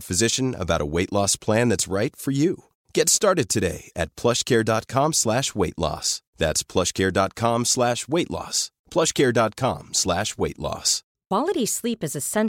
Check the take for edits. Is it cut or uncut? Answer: cut